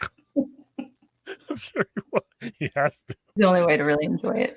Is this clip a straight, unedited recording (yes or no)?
no